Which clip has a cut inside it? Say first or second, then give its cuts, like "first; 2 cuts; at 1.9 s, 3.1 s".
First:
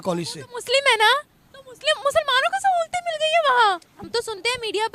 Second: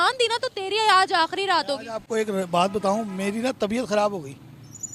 first; 1 cut; at 4.0 s